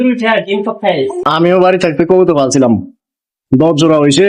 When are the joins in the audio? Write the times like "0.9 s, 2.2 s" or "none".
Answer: 1.3 s